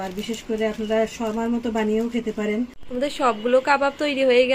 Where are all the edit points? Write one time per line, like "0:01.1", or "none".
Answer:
0:02.8